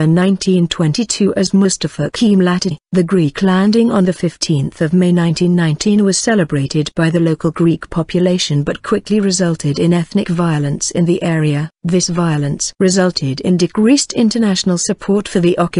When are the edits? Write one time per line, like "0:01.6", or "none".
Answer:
none